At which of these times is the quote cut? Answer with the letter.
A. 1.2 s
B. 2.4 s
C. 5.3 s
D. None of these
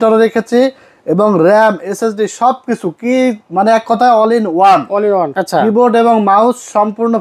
C